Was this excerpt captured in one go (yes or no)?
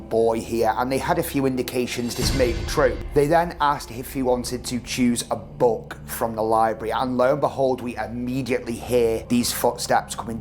no